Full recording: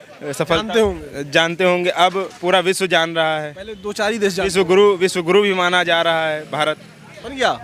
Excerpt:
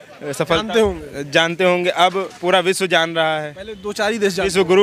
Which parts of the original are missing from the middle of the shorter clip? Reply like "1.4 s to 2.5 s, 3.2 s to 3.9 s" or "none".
none